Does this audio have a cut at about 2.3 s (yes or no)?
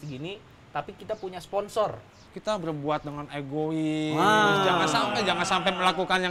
yes